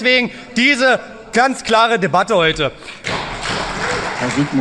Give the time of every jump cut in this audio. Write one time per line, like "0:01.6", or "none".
0:03.0